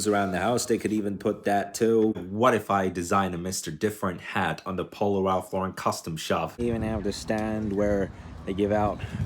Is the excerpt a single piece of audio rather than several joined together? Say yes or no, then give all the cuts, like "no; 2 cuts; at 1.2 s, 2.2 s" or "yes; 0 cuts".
no; 2 cuts; at 2.3 s, 6.6 s